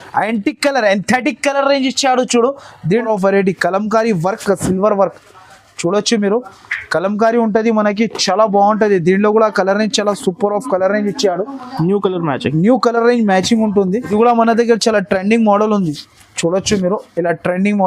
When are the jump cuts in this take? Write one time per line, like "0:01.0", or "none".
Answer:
0:02.9
0:14.1

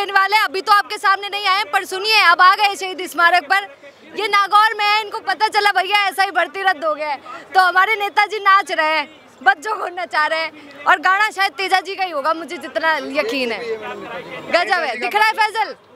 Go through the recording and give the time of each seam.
none

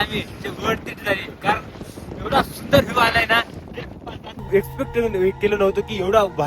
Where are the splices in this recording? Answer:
0:04.4

